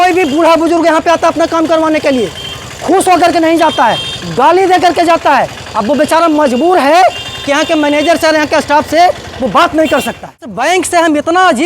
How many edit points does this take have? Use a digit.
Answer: 1